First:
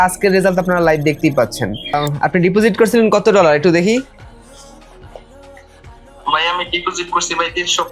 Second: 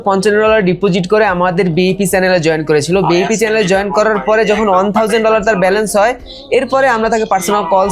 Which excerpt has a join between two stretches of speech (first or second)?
first